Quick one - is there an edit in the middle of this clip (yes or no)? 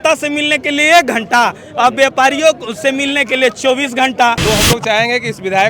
yes